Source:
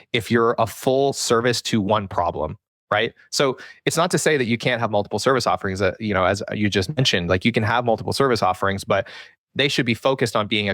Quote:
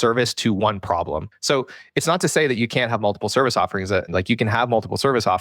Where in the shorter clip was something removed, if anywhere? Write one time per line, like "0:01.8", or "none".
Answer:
0:01.3
0:04.1